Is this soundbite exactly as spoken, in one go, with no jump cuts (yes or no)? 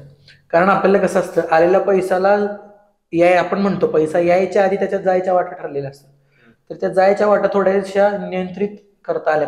yes